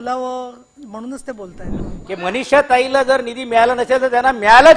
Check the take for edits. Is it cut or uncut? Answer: cut